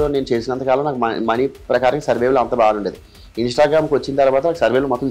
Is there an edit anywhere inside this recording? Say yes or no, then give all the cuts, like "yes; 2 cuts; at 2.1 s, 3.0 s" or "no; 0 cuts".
no; 0 cuts